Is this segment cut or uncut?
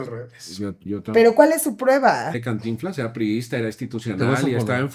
cut